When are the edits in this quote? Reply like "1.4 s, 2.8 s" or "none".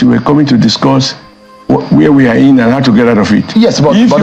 none

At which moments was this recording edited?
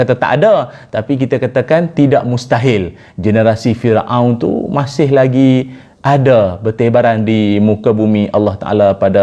none

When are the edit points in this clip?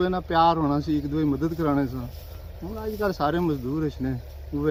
none

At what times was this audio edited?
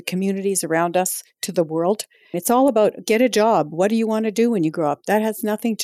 2.4 s

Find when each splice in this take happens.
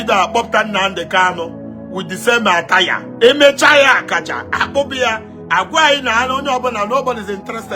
3.0 s

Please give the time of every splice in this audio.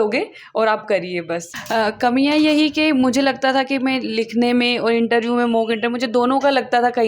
1.5 s

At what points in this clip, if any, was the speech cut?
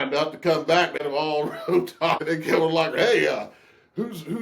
1.0 s, 2.2 s

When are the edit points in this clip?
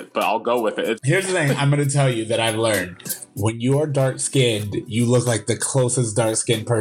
1.0 s

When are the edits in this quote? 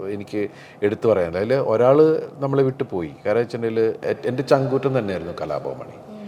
none

